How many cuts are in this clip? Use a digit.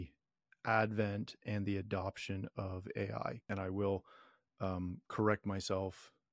1